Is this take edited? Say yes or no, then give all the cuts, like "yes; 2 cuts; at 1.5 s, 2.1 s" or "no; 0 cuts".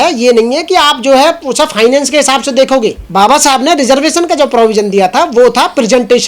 yes; 1 cut; at 3.0 s